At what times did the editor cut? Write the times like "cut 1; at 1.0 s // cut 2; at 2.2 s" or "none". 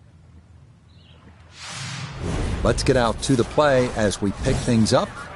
cut 1; at 1.6 s